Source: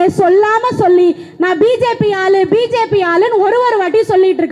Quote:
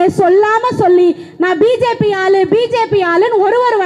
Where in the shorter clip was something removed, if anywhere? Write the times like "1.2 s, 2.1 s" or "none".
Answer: none